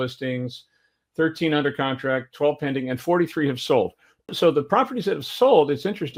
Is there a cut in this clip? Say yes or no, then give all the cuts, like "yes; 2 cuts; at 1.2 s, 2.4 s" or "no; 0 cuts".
no; 0 cuts